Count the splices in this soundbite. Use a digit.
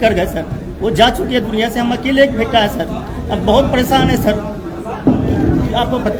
0